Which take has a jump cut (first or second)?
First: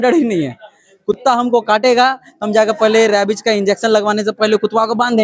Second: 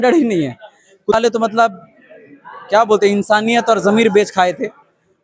second